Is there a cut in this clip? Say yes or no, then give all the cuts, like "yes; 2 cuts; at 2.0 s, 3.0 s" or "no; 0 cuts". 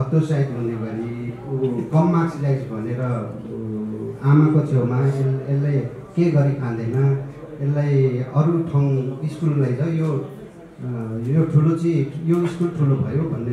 no; 0 cuts